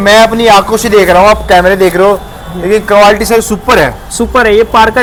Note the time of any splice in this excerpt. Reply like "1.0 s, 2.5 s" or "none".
none

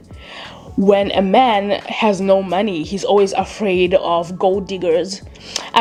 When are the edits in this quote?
none

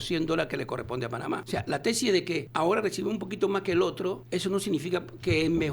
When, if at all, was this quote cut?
1.4 s, 2.5 s, 4.2 s

